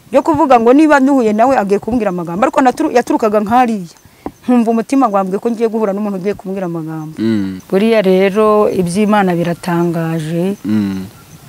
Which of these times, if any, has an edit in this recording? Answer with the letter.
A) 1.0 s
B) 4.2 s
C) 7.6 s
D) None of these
C